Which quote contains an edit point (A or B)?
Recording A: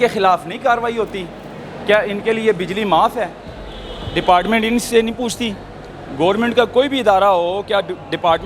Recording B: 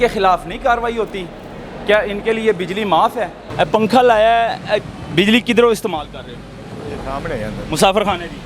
B